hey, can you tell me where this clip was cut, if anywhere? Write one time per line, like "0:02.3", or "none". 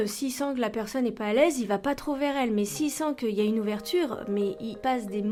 none